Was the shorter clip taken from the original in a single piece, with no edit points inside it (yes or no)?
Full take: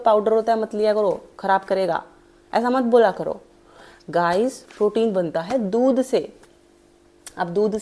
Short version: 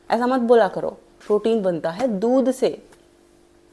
no